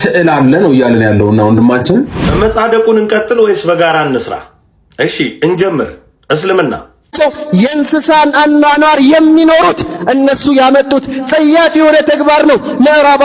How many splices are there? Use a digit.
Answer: 1